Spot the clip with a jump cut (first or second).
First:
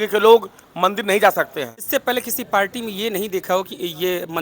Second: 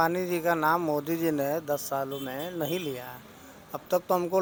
first